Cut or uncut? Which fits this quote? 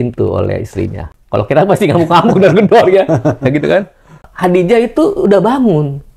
cut